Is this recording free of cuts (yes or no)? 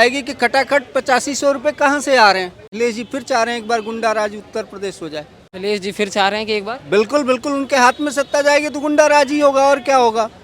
no